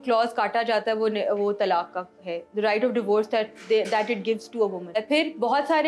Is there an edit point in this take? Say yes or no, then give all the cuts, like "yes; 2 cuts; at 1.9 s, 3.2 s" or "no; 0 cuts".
yes; 1 cut; at 5.0 s